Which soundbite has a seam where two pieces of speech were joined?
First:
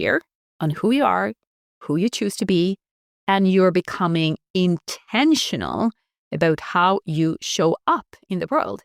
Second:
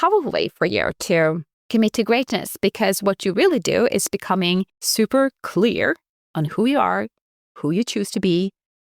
second; 2 cuts; at 1.5 s, 4.8 s

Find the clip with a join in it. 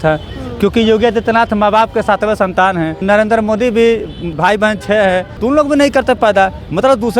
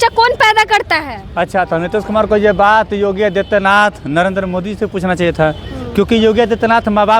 first; 3 cuts; at 3.0 s, 4.3 s, 5.3 s

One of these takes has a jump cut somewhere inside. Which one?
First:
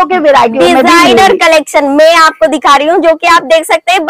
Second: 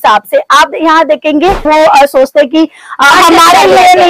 second; 1 cut; at 1.7 s

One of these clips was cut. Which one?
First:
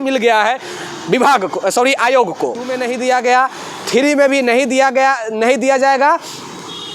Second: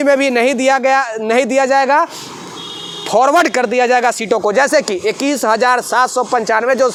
first; 1 cut; at 2.8 s

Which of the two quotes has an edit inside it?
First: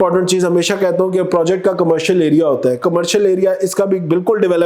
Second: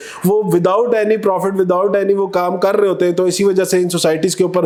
first; 1 cut; at 2.8 s

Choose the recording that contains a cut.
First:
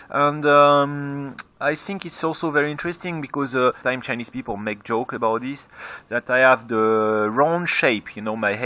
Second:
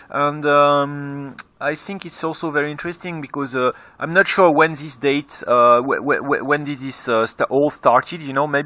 second; 1 cut; at 3.8 s

